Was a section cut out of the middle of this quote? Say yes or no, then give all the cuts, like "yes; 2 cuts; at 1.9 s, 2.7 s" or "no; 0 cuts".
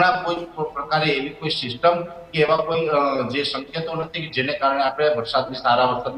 no; 0 cuts